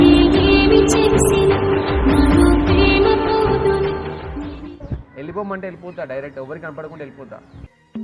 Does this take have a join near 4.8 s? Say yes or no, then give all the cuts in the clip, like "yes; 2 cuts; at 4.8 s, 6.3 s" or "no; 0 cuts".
yes; 1 cut; at 4.8 s